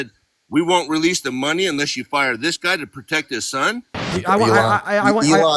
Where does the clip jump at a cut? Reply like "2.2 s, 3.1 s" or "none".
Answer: 4.0 s